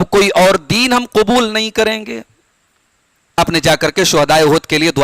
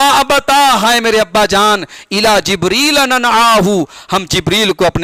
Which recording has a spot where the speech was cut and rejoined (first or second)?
first